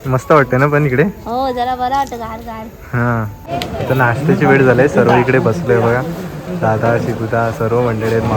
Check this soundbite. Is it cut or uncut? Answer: cut